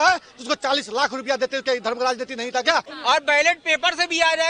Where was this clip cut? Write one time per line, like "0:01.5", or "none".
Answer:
0:02.9